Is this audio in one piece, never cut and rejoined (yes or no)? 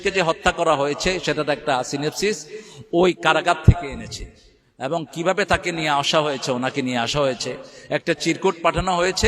yes